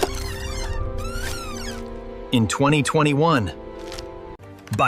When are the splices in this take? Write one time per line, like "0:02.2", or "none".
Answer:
none